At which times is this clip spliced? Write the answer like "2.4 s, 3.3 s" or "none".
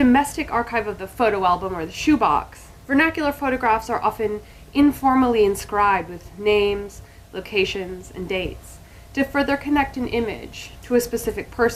none

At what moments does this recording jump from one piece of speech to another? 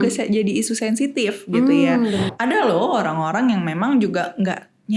2.3 s

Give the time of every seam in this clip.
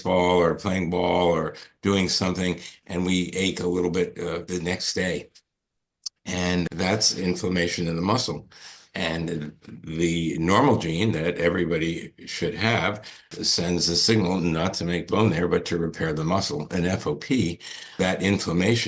4.4 s, 6.6 s, 13.3 s, 18.0 s

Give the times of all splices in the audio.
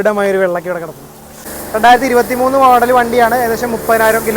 1.5 s

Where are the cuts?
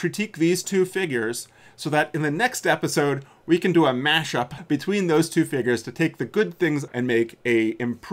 4.6 s, 6.9 s

